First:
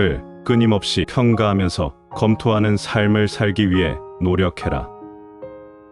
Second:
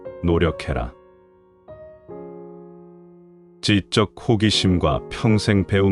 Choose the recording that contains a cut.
first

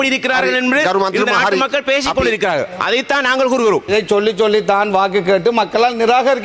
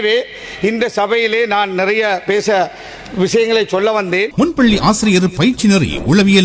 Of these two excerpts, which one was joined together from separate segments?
second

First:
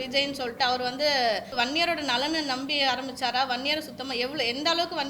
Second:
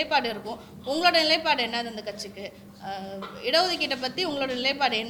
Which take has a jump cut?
first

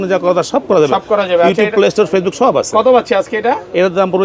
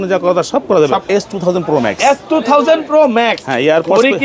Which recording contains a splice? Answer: second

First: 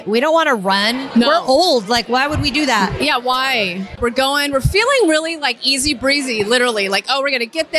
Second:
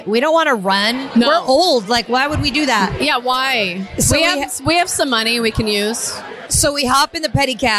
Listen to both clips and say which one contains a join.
first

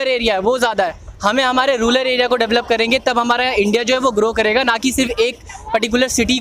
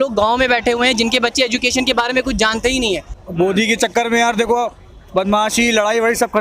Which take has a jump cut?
second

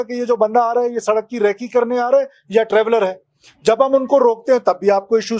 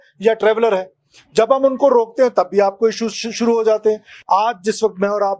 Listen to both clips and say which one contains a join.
second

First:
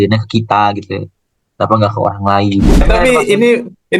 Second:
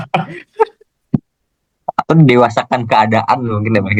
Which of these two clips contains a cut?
first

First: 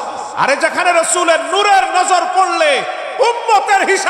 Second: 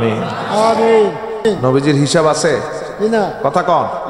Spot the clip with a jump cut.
second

